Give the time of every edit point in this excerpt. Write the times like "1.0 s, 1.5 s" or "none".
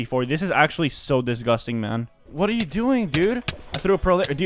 2.2 s